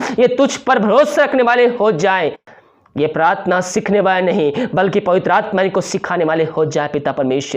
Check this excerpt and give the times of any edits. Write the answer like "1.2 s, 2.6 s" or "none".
2.4 s